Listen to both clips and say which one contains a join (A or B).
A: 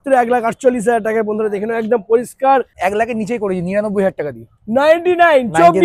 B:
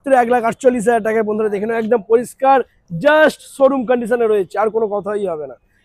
A